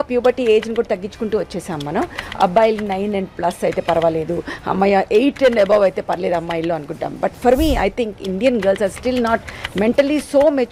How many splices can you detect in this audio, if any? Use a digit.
0